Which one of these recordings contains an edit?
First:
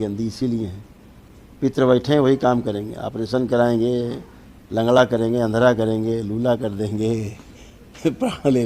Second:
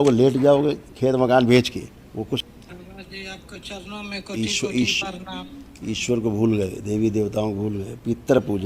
second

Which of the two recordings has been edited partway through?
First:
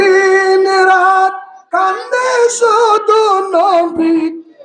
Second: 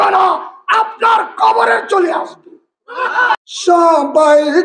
second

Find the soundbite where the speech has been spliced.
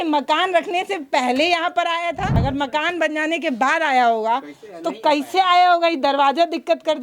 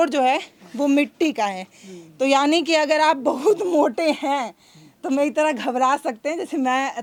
first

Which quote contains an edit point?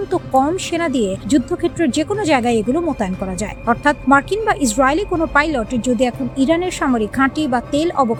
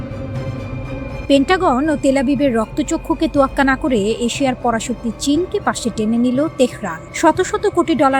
second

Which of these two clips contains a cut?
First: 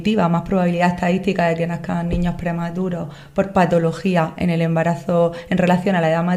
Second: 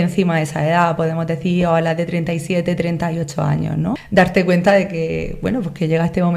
second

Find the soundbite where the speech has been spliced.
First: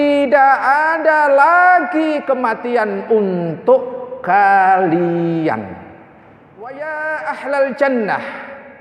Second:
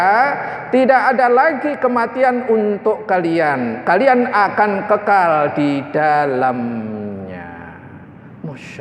first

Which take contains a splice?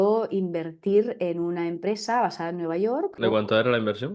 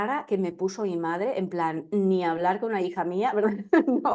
first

